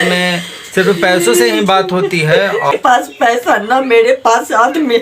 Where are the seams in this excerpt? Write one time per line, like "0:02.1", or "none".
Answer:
0:02.7